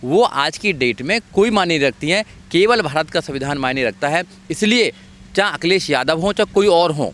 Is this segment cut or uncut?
uncut